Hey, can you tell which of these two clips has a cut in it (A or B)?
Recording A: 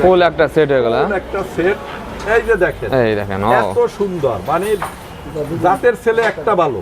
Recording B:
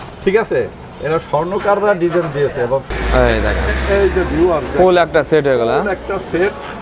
B